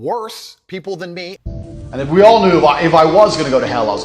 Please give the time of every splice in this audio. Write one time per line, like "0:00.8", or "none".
0:01.4